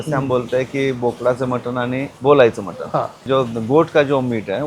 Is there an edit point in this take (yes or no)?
yes